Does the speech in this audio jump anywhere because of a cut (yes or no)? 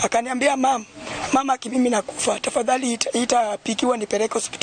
no